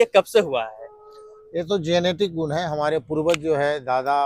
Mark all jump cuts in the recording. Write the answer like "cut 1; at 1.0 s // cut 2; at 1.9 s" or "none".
none